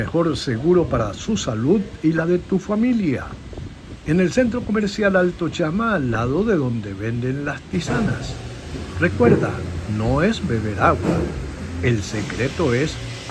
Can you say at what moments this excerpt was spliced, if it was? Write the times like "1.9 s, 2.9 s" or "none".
none